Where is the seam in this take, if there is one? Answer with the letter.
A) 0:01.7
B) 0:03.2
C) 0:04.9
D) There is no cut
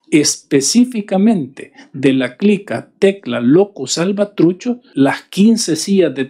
C